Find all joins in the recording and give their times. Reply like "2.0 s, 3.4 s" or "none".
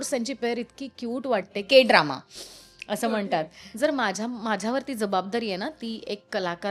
3.6 s